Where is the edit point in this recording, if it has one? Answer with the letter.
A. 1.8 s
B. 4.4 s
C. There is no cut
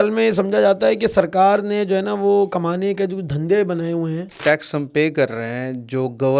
B